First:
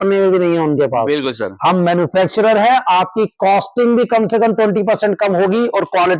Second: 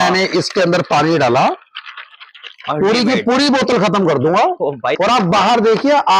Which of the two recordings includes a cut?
second; 1 cut; at 4.9 s

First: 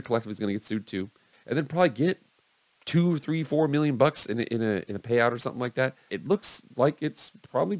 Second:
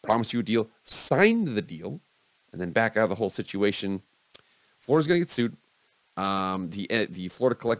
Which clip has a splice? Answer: first; 2 cuts; at 1.3 s, 6.1 s

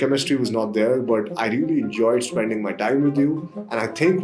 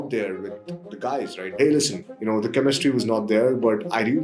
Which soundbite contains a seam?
second; 1 cut; at 1.6 s

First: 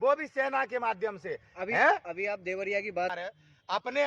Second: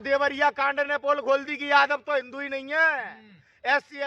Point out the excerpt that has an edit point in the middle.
first; 1 cut; at 3.2 s

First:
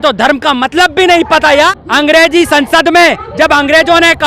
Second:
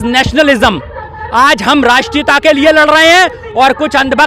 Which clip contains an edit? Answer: first; 1 cut; at 1.7 s

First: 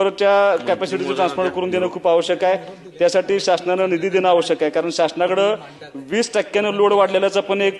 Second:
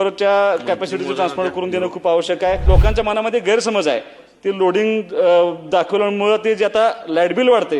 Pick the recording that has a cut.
second; 1 cut; at 2.6 s

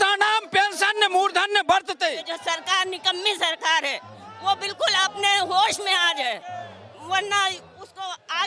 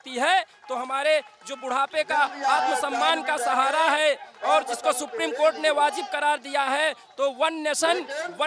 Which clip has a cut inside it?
first; 1 cut; at 2.3 s

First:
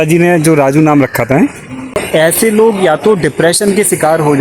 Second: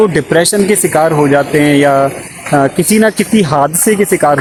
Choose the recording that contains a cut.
first; 1 cut; at 2.0 s

